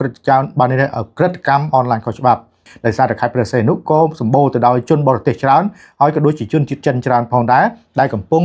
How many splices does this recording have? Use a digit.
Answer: 1